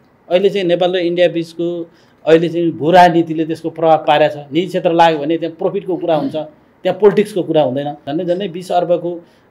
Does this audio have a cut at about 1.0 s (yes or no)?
no